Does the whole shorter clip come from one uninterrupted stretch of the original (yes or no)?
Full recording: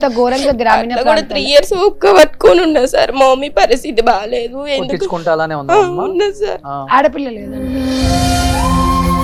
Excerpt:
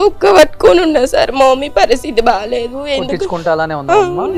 yes